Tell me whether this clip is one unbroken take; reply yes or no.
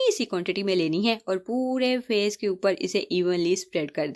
yes